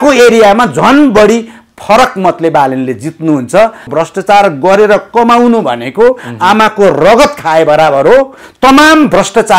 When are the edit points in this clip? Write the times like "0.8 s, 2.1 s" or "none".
3.9 s